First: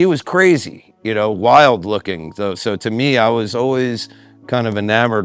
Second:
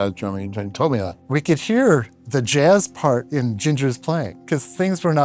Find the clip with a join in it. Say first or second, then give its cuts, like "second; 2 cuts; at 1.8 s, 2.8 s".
second; 2 cuts; at 1.1 s, 4.4 s